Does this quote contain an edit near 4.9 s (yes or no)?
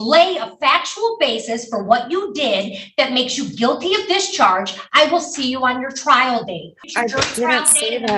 no